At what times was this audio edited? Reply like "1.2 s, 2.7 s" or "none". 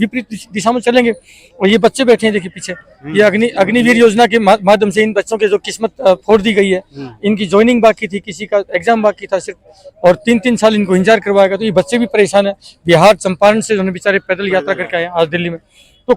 none